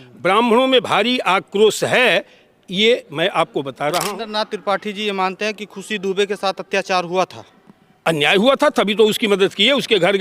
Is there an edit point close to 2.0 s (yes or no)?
no